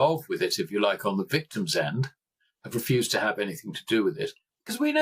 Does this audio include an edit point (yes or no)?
no